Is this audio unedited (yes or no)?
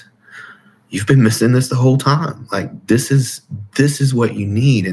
yes